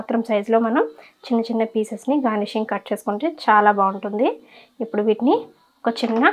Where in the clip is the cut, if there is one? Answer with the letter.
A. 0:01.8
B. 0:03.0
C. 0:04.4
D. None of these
D